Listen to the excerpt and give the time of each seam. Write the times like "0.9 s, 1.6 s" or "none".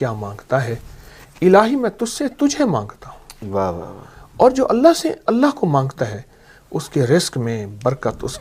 none